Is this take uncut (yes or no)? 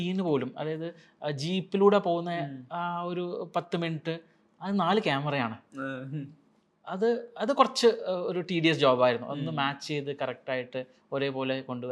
yes